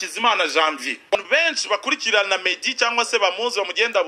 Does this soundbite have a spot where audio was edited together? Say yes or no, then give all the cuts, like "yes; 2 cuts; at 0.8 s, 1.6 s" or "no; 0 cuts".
yes; 1 cut; at 1.1 s